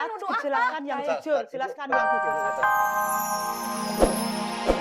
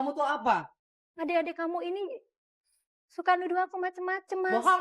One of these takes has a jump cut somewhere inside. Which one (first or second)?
first